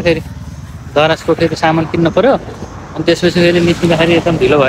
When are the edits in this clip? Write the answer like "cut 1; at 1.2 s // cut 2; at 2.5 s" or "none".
none